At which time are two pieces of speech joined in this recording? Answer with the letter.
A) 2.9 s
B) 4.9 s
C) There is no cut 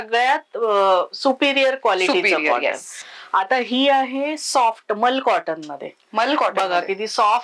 C